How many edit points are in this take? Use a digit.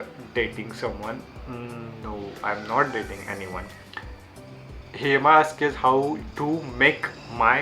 0